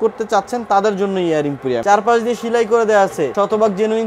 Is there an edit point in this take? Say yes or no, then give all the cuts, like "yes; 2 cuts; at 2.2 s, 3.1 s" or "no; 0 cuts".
yes; 2 cuts; at 1.8 s, 3.3 s